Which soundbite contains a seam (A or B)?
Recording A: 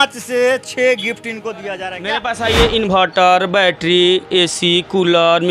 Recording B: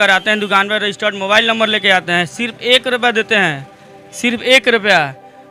A